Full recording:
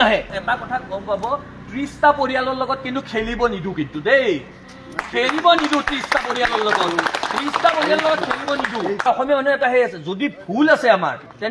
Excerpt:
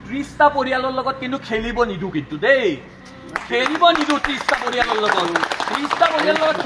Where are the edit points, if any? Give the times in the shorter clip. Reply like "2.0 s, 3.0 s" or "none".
none